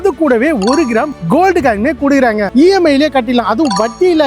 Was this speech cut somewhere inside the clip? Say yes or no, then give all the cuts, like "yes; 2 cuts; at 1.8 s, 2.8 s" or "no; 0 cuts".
yes; 1 cut; at 2.5 s